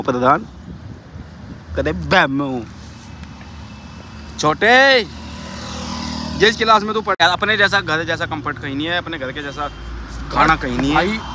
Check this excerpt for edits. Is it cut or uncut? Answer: cut